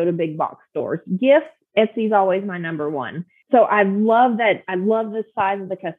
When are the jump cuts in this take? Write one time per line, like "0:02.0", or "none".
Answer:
0:03.3